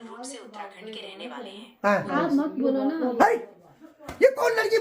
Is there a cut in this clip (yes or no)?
yes